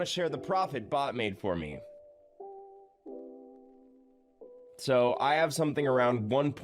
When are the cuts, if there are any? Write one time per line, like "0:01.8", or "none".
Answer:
0:02.0
0:04.8